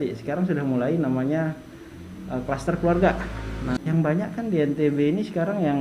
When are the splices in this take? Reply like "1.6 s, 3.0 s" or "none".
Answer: 3.8 s